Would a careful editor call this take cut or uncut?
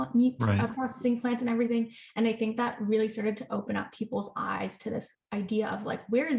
uncut